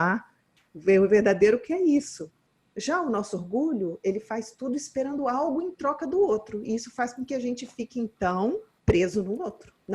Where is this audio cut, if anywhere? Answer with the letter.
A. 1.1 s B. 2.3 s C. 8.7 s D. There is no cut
C